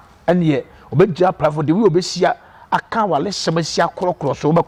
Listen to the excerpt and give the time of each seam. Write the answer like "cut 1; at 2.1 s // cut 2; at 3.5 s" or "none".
none